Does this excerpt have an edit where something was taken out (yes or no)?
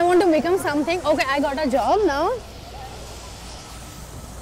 no